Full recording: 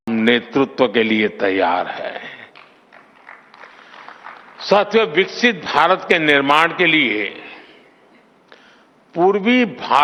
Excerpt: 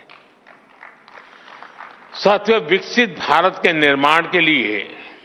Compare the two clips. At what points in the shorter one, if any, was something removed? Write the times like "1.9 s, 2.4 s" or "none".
none